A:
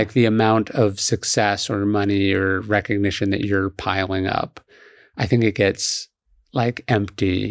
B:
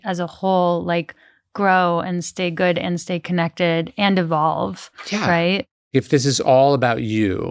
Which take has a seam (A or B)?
B